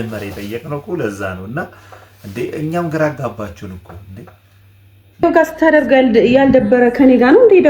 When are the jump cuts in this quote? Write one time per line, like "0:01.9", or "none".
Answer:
0:05.2